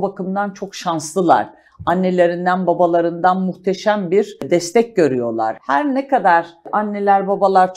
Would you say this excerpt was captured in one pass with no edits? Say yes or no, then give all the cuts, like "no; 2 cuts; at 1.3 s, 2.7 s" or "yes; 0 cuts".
no; 3 cuts; at 4.4 s, 5.6 s, 6.7 s